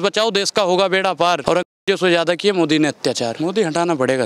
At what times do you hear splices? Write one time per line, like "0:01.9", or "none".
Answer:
0:01.4
0:03.4